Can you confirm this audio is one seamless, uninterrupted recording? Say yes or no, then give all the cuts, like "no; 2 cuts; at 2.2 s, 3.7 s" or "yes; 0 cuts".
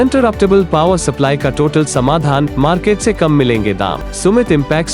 no; 1 cut; at 4.0 s